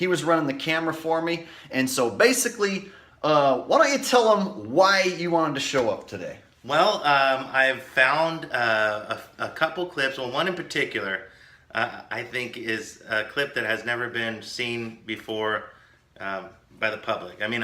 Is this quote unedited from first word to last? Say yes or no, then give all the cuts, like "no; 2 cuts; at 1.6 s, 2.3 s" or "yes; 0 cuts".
no; 1 cut; at 12.8 s